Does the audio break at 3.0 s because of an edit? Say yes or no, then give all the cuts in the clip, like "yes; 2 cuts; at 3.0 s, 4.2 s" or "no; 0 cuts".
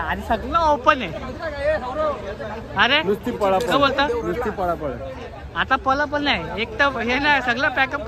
no; 0 cuts